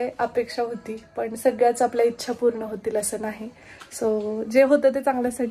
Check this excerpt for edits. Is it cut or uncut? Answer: uncut